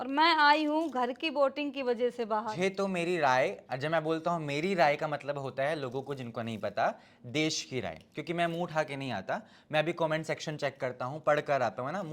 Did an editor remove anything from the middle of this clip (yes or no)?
yes